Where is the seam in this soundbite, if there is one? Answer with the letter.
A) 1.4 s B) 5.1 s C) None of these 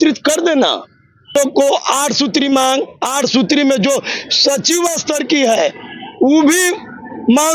A